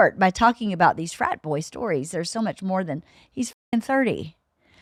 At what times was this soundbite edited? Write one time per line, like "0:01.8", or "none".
none

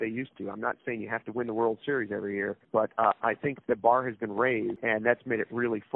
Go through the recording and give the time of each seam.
0:02.6
0:04.8

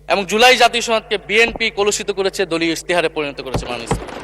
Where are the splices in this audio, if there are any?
none

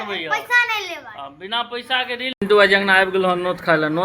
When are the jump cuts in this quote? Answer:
0:02.4

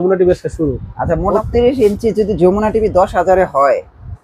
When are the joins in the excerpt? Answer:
0:01.3

